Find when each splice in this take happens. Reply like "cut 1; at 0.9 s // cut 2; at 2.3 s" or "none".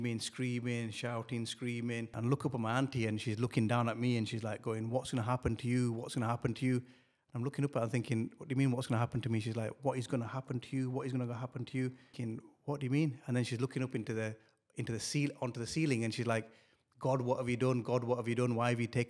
cut 1; at 2.2 s // cut 2; at 12.1 s